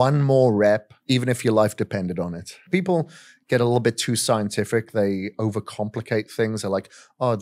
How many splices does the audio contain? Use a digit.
2